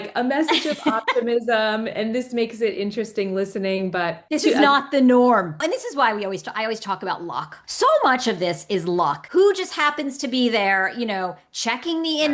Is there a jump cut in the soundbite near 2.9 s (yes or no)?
no